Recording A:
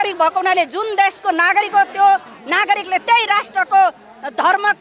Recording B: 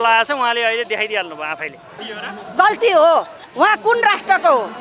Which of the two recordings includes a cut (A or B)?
B